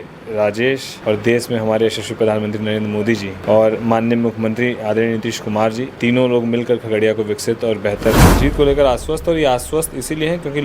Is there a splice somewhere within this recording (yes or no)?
yes